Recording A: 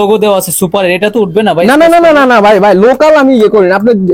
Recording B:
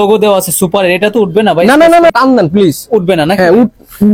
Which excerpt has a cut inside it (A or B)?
B